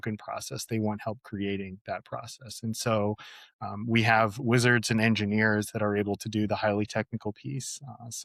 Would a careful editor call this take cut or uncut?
uncut